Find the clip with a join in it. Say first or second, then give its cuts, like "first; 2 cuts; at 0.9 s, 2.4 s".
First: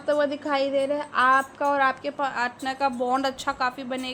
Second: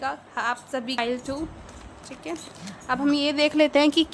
second; 1 cut; at 1.0 s